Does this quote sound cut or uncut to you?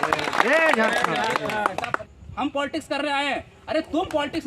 cut